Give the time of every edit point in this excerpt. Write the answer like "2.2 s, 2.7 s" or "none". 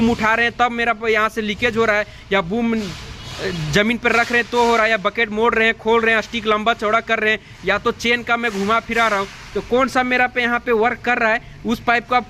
none